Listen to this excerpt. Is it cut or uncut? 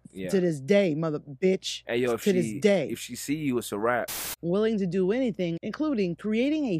cut